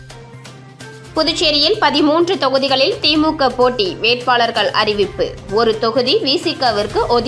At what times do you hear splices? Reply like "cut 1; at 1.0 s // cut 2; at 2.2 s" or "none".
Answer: cut 1; at 0.9 s